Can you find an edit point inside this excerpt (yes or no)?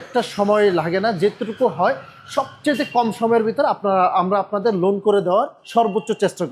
yes